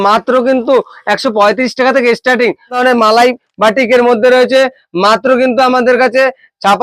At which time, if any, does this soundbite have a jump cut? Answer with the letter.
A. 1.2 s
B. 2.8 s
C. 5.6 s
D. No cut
B